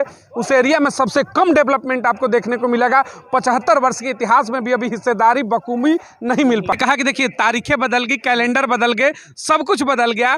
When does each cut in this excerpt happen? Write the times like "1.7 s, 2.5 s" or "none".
6.7 s